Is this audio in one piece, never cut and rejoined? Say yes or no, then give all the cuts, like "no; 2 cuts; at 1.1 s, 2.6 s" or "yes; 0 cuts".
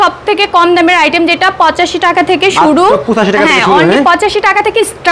yes; 0 cuts